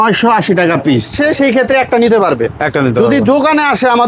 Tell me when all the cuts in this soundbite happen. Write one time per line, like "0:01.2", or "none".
0:01.2